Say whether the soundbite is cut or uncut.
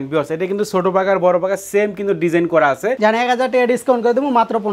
cut